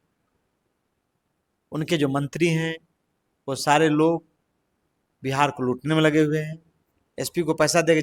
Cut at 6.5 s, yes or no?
yes